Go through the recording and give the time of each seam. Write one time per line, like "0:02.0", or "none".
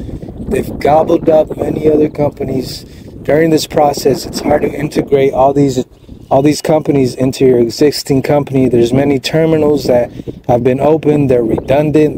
none